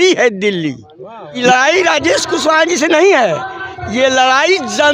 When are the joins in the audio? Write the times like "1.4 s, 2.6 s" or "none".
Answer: 1.4 s